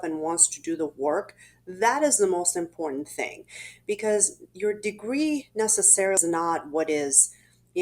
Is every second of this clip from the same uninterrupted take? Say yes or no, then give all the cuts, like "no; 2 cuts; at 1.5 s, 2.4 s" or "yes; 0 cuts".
no; 1 cut; at 6.2 s